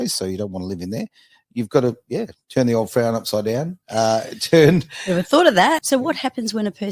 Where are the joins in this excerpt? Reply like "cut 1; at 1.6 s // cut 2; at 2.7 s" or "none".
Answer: cut 1; at 5.8 s